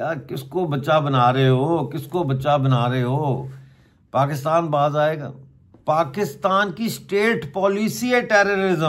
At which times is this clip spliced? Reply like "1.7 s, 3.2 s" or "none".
none